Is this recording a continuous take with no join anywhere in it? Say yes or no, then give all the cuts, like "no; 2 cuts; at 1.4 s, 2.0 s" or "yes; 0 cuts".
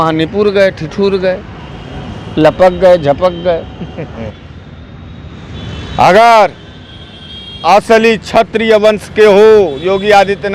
no; 1 cut; at 4.4 s